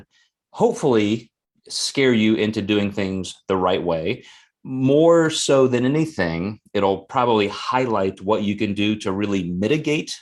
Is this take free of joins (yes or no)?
yes